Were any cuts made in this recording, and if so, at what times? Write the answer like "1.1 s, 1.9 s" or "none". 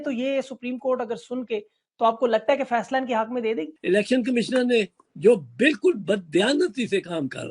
3.8 s